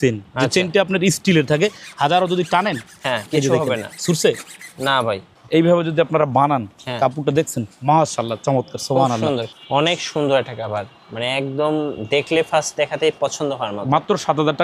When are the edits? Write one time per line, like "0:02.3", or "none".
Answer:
0:05.3
0:09.5